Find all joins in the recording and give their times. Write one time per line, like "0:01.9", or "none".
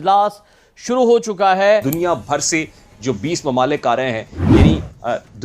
0:01.8